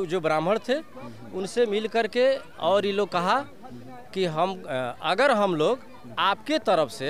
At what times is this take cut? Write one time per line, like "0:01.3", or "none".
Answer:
none